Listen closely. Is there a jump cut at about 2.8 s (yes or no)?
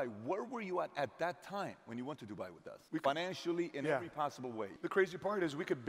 yes